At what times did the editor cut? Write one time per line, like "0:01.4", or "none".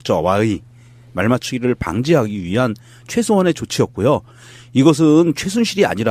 0:03.3